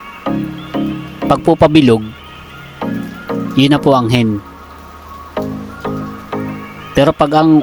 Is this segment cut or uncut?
cut